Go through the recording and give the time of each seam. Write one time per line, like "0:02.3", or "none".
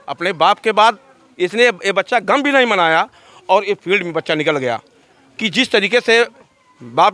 none